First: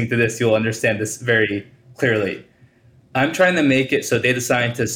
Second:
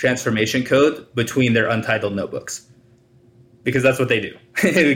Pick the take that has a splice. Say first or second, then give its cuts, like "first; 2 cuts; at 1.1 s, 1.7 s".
first; 1 cut; at 1.8 s